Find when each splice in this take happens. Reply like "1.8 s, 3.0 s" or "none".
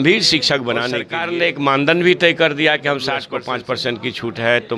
1.1 s, 3.4 s